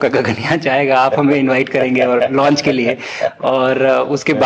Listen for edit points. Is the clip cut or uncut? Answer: uncut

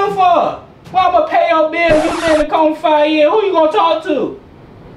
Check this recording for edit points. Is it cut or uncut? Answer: uncut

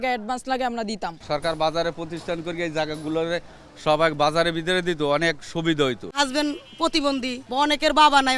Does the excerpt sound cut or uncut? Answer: cut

